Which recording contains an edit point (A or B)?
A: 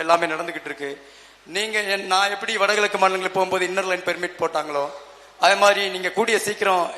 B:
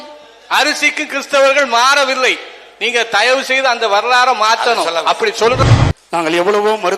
B